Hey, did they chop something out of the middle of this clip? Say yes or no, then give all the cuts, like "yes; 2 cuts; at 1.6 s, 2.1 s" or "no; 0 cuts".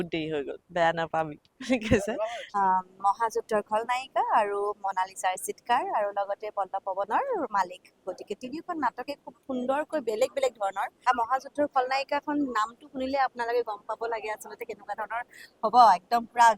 yes; 2 cuts; at 2.4 s, 10.9 s